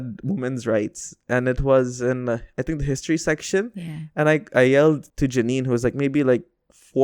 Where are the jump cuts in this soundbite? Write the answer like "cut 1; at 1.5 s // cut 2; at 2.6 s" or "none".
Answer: cut 1; at 5.1 s